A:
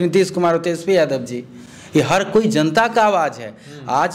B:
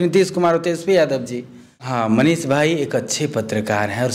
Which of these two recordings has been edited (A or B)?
B